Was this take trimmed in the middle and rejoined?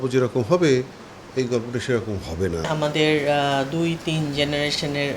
yes; 1 cut; at 2.7 s

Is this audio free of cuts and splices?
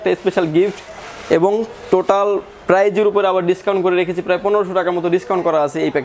yes; 0 cuts

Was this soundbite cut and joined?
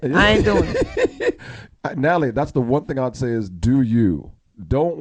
no; 0 cuts

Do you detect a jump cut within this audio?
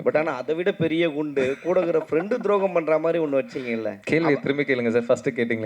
yes; 1 cut; at 3.9 s

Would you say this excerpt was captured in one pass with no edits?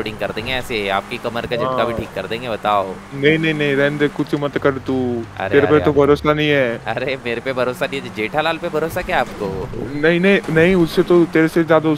yes; 0 cuts

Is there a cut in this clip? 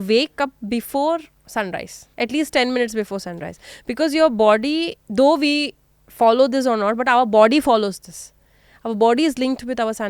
yes; 1 cut; at 2.0 s

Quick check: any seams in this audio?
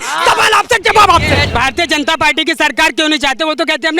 yes; 1 cut; at 1.5 s

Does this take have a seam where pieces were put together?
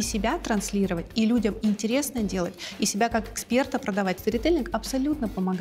yes; 1 cut; at 4.2 s

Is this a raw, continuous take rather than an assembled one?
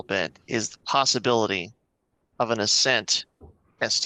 yes; 0 cuts

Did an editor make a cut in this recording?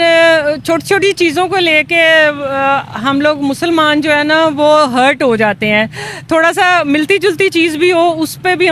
no; 0 cuts

